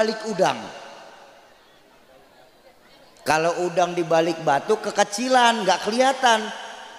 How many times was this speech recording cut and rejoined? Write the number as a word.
zero